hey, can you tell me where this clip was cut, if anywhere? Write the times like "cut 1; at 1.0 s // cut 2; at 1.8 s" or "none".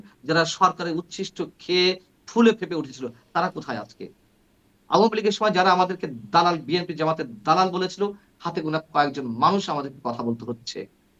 none